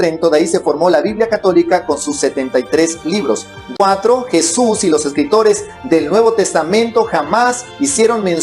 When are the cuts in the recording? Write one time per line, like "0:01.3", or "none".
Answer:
0:03.6